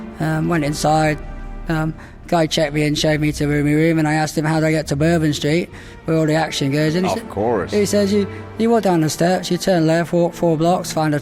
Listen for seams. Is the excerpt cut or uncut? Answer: uncut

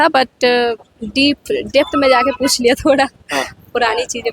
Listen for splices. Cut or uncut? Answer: uncut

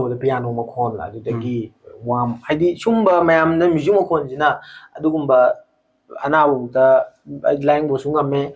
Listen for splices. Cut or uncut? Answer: uncut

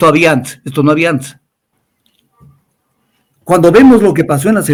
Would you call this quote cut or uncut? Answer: uncut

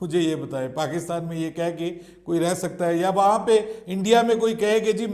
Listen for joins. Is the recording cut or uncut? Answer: uncut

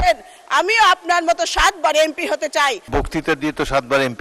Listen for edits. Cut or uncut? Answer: cut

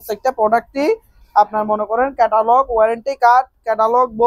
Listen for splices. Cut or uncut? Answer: uncut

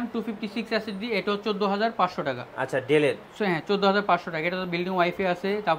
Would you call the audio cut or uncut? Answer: uncut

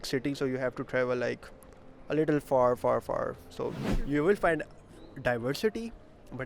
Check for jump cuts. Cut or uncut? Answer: cut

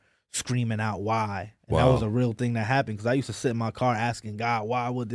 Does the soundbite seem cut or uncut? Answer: uncut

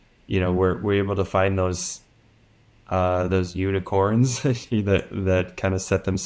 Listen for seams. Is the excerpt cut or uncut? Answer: uncut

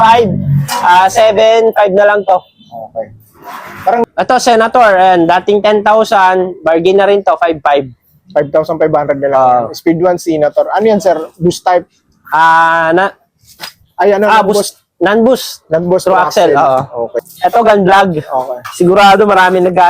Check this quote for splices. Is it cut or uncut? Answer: cut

